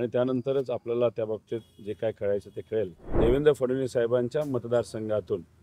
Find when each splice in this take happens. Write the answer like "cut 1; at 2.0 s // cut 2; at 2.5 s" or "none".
cut 1; at 3.0 s